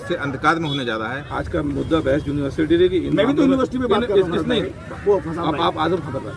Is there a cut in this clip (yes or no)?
yes